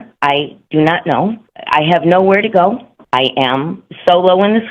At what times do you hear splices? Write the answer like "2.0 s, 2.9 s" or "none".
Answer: 1.5 s, 2.9 s

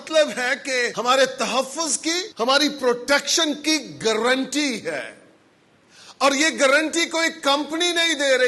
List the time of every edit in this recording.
0.9 s, 2.3 s

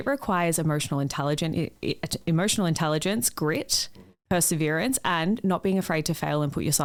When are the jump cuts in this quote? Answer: none

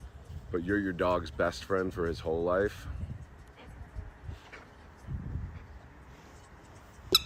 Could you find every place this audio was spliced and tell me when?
none

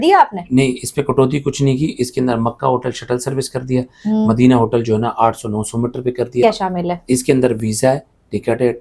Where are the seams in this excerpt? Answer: 6.4 s

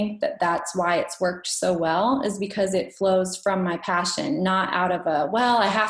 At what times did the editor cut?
none

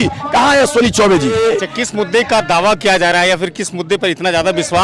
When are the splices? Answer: 1.4 s

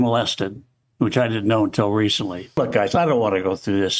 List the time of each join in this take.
2.4 s

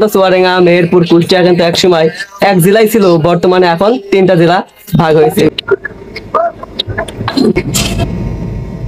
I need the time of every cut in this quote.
5.5 s

